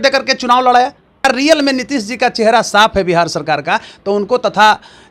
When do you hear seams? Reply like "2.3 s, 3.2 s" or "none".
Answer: 1.2 s